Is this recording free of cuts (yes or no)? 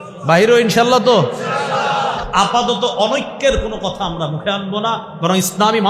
no